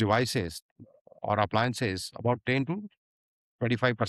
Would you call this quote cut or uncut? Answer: uncut